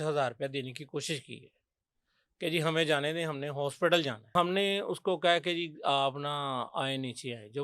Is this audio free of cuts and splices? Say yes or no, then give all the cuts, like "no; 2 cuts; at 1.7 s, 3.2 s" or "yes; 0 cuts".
no; 1 cut; at 4.3 s